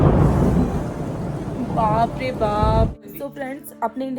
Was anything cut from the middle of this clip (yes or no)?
yes